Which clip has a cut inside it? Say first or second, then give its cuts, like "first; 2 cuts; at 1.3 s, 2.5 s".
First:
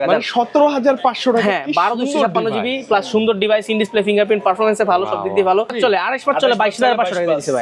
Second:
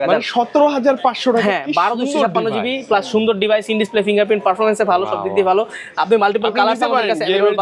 first; 1 cut; at 5.7 s